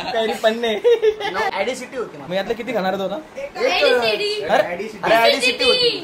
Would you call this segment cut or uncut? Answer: cut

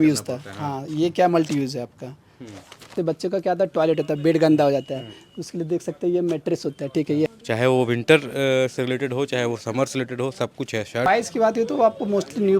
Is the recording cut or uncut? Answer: cut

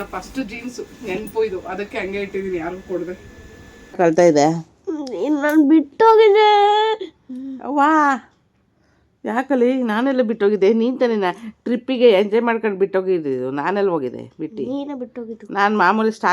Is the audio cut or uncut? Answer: cut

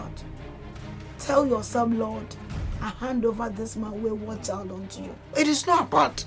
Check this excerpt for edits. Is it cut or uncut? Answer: cut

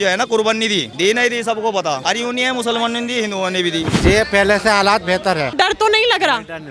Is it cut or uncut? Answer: cut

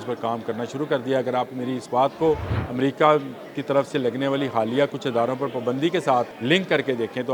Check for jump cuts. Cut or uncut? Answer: cut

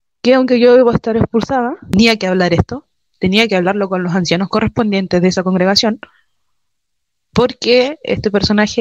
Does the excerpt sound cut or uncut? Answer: cut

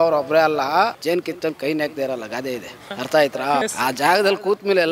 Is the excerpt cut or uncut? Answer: cut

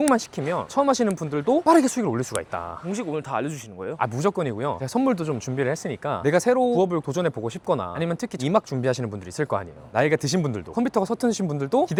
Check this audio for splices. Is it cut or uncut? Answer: uncut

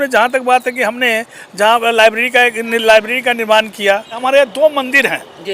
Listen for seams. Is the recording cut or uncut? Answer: cut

